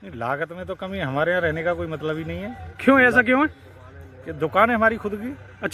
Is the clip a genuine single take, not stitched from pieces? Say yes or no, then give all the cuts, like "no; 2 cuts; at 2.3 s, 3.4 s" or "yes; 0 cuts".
yes; 0 cuts